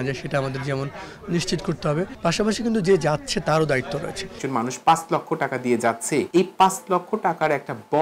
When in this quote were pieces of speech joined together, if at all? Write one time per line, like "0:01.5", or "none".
0:02.1
0:04.4
0:06.3